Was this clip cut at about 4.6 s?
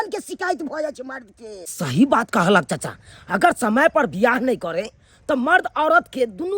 no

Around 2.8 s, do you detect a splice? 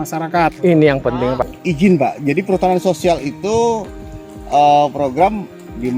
no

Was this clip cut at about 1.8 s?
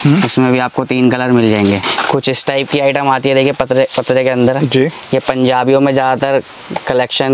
yes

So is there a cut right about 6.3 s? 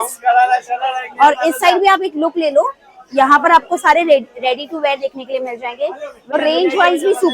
yes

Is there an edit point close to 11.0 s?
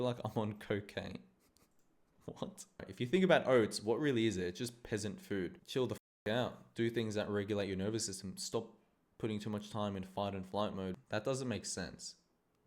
yes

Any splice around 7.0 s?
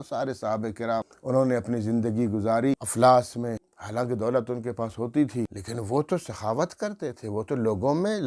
no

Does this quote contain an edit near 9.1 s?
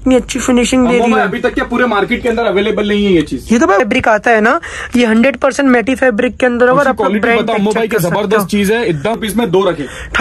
yes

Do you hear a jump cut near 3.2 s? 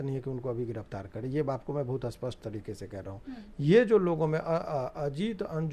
no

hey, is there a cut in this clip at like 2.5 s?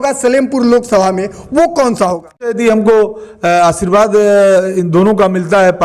yes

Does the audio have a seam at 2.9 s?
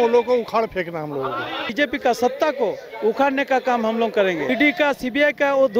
no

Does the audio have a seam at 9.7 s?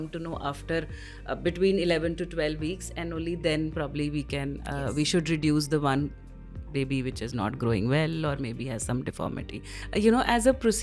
yes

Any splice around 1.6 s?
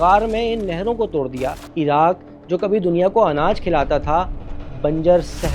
yes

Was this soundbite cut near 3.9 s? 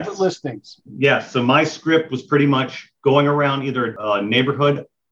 yes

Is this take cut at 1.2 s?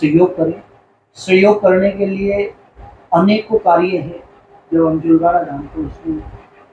no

